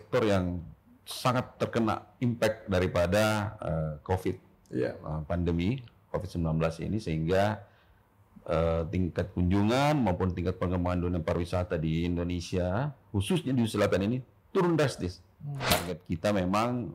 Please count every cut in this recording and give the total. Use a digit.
1